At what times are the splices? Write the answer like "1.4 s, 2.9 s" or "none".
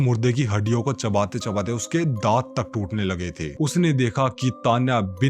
3.6 s